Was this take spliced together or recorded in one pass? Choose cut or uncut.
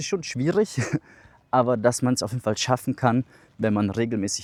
uncut